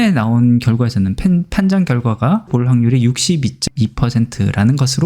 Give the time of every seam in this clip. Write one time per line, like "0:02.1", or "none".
0:02.5